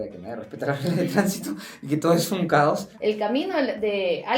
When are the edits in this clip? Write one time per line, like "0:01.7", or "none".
0:02.9